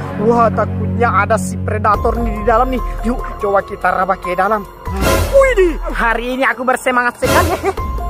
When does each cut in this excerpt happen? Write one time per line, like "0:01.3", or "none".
0:05.9